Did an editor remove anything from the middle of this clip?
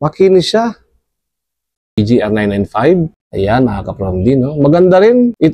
yes; 1 cut; at 2.0 s

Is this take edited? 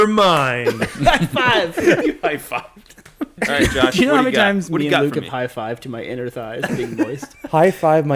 yes; 1 cut; at 3.3 s

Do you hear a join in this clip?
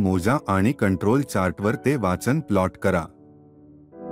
yes; 1 cut; at 3.0 s

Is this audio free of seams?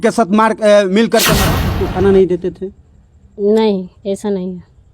no; 1 cut; at 1.7 s

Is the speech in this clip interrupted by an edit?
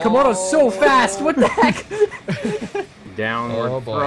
yes; 1 cut; at 2.8 s

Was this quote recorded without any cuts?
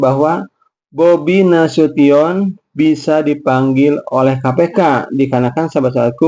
yes; 0 cuts

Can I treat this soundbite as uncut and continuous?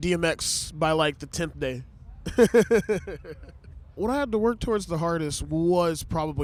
yes; 0 cuts

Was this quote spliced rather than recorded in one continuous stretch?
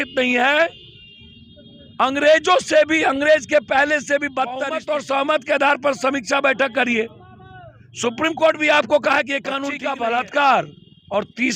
yes; 2 cuts; at 4.7 s, 9.7 s

